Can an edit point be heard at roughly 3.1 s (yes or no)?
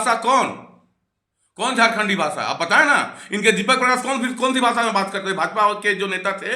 no